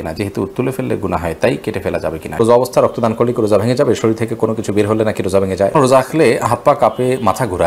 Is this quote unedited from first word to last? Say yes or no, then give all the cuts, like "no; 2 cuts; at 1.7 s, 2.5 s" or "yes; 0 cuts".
no; 2 cuts; at 2.4 s, 5.7 s